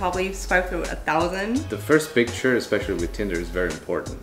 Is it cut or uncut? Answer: cut